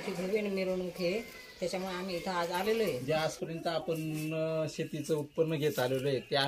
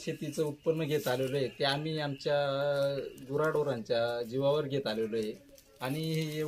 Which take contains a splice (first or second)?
first